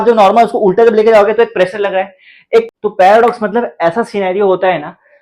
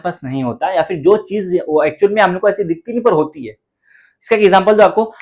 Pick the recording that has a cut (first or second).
first